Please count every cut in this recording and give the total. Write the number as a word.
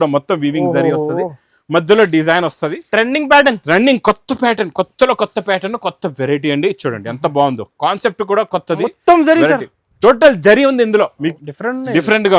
one